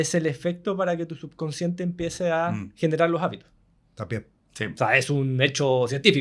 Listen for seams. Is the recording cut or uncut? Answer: uncut